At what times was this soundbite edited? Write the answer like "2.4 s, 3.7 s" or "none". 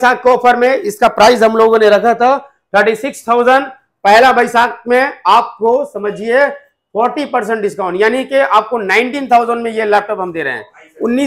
none